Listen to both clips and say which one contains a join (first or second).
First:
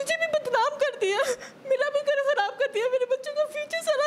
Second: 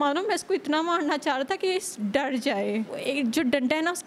second